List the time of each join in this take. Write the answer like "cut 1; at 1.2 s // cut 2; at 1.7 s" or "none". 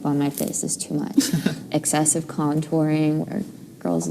cut 1; at 1.6 s